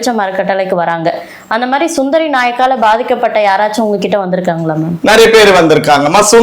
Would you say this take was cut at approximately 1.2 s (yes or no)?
no